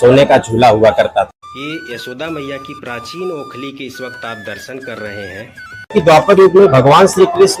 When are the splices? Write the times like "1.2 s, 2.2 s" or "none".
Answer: 1.3 s, 5.9 s